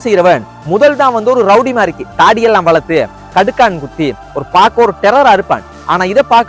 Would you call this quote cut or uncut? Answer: uncut